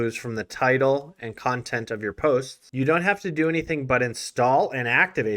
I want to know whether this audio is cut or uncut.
uncut